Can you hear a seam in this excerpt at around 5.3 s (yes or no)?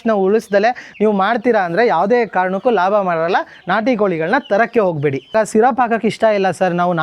yes